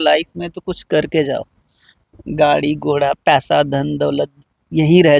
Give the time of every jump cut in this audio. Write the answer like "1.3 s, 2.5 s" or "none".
none